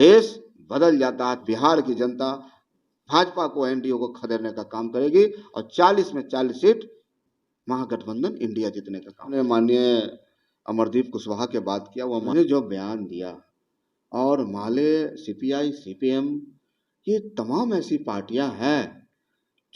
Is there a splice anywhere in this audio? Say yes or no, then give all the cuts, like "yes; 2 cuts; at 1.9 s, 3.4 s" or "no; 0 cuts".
yes; 3 cuts; at 1.4 s, 9.3 s, 12.3 s